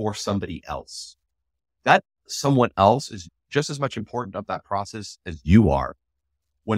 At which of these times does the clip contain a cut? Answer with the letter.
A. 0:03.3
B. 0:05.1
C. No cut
A